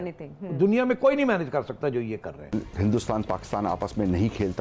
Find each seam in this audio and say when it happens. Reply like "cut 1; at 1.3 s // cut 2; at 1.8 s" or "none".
cut 1; at 2.5 s